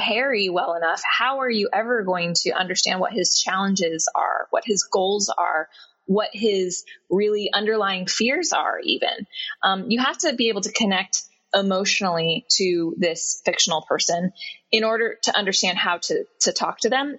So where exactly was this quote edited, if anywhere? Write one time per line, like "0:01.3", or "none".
none

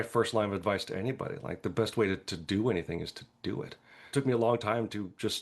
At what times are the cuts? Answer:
0:04.1

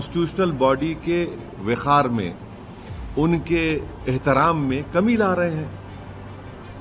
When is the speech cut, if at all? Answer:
none

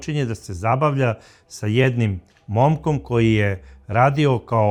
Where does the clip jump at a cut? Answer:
none

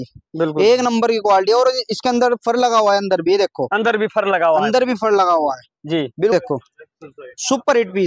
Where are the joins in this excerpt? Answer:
0:06.3

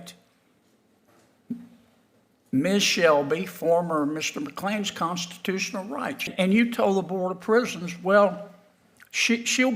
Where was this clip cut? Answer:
0:06.3

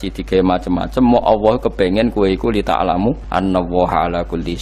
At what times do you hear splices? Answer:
0:03.2

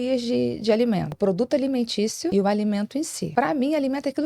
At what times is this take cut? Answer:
0:01.1
0:02.3
0:03.2

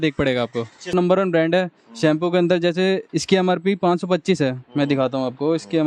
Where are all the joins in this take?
0:00.9

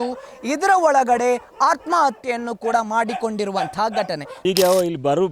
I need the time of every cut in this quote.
0:04.4

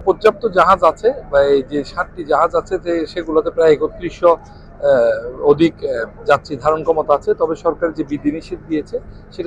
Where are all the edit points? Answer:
none

